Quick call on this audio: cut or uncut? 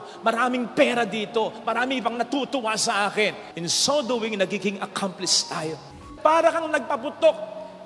cut